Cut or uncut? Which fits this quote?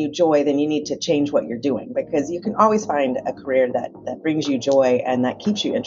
uncut